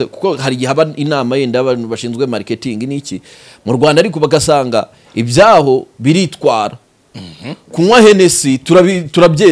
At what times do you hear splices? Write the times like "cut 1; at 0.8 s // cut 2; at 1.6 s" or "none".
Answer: none